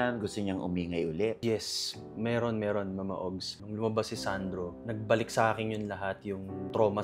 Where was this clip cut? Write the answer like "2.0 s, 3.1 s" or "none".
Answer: 1.4 s, 3.5 s